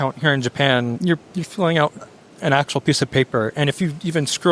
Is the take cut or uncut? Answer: cut